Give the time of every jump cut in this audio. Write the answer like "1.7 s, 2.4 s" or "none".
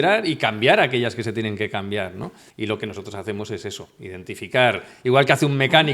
2.4 s

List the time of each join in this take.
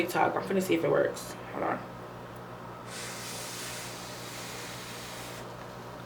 none

